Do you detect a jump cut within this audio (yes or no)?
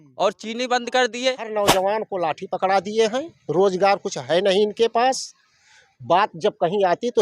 yes